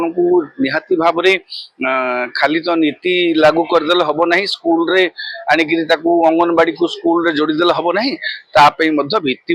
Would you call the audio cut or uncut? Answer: uncut